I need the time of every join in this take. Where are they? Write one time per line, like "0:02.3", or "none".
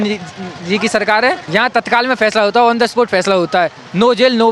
0:01.4